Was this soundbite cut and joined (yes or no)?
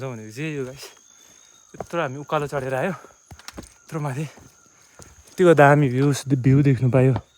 no